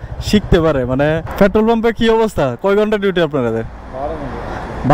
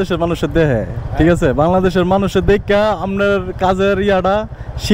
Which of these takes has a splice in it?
first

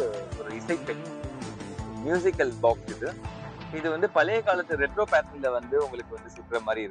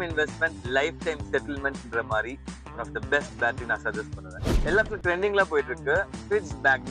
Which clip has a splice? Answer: second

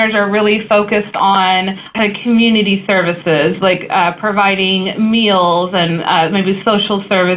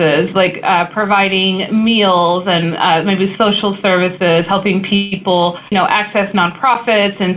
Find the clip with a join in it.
first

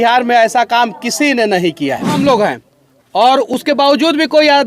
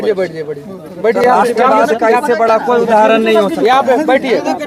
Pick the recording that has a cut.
first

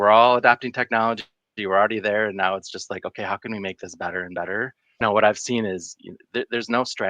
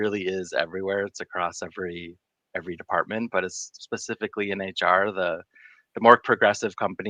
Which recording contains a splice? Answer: first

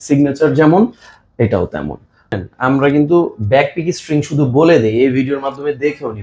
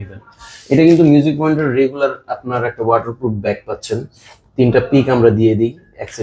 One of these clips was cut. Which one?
first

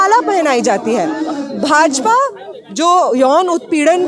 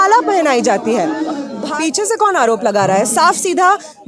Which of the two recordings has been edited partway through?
second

